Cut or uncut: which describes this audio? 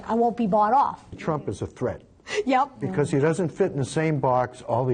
cut